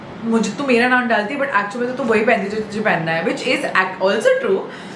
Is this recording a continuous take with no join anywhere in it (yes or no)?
yes